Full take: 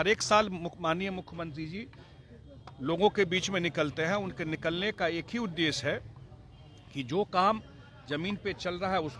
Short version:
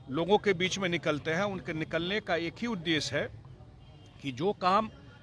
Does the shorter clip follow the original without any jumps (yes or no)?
yes